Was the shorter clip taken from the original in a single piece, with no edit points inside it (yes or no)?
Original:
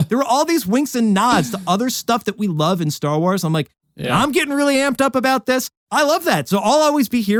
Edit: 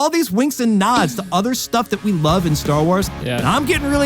no